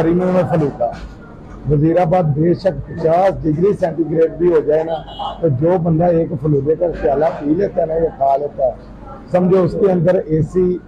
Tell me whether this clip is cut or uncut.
uncut